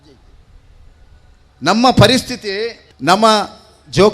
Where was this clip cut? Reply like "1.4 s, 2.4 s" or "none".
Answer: 2.8 s